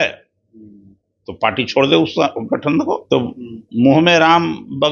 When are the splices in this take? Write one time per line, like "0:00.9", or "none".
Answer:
0:03.0